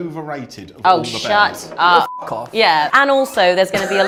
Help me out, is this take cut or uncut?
uncut